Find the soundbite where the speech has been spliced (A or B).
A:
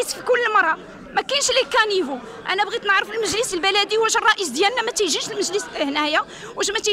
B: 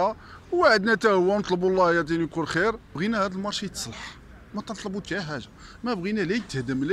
B